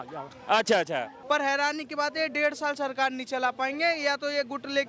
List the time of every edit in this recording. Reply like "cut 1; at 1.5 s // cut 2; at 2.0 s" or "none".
cut 1; at 1.1 s